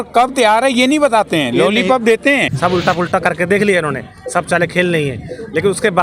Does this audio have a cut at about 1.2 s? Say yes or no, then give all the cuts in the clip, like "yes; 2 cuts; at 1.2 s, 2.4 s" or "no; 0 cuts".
no; 1 cut; at 2.5 s